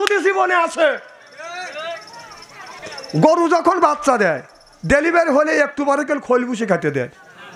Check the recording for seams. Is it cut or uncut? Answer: cut